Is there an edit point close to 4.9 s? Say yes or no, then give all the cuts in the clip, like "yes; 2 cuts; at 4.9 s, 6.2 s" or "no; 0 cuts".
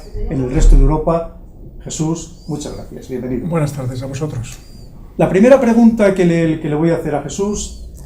yes; 1 cut; at 4.9 s